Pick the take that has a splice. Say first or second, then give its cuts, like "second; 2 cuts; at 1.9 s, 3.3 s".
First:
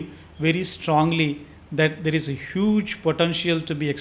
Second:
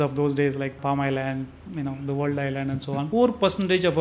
second; 1 cut; at 3.1 s